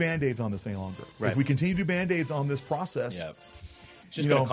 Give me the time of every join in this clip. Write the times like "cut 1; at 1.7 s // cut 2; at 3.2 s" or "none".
none

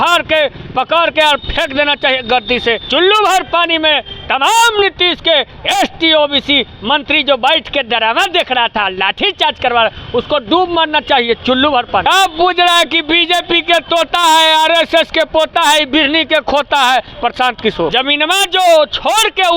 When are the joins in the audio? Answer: cut 1; at 2.8 s // cut 2; at 12.0 s // cut 3; at 17.9 s

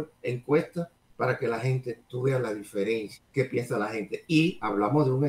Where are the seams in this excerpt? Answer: cut 1; at 1.0 s // cut 2; at 3.2 s

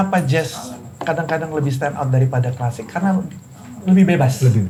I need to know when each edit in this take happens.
none

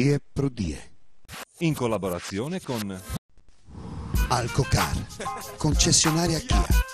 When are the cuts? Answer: cut 1; at 3.3 s

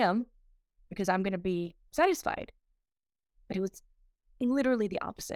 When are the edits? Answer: none

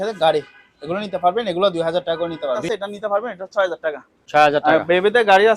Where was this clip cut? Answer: cut 1; at 2.6 s

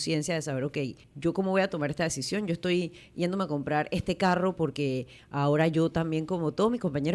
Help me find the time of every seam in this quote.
cut 1; at 1.0 s

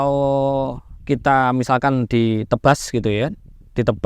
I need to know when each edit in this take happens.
none

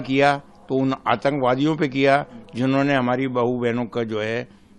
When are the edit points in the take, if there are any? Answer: none

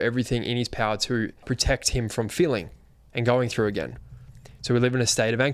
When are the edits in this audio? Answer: cut 1; at 1.4 s

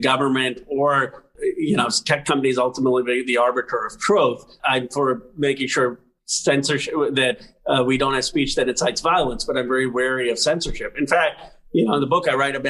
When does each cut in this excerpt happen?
cut 1; at 1.3 s // cut 2; at 4.6 s

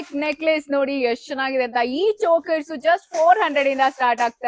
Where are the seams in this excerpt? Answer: none

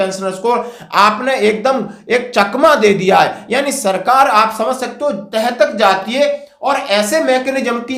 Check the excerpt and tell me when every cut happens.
none

